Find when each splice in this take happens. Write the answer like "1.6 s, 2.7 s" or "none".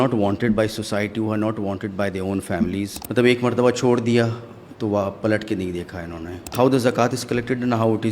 3.0 s, 6.5 s